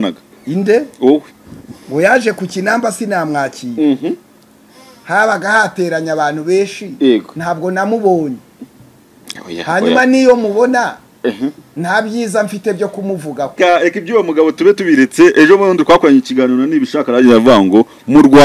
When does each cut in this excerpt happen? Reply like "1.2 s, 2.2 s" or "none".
13.6 s